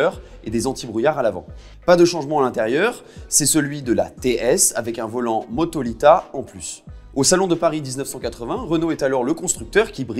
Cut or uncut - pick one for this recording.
uncut